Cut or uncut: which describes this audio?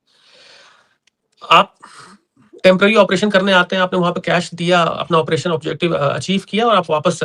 uncut